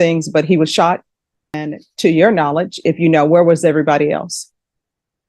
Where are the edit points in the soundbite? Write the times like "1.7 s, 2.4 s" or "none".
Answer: 1.6 s